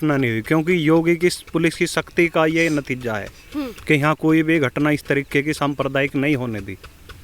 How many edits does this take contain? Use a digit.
0